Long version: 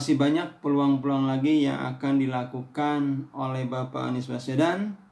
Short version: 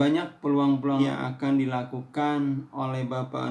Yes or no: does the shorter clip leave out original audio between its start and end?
yes